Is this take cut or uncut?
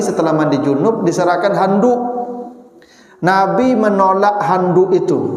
uncut